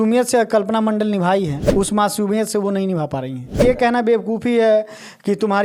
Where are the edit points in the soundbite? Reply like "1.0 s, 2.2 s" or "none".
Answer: 1.6 s, 3.6 s